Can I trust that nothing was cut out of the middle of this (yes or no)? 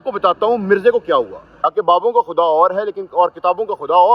no